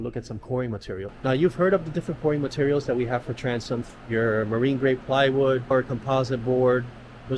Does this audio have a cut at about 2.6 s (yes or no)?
no